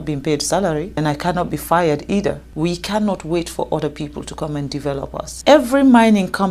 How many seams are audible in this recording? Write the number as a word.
three